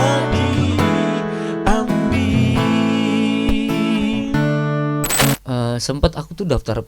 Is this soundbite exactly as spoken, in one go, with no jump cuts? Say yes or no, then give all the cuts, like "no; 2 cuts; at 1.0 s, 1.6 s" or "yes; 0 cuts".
no; 1 cut; at 5.3 s